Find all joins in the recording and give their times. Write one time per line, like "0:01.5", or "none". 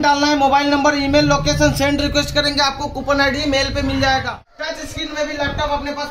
0:04.3